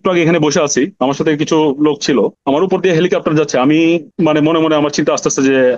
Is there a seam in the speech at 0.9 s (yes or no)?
yes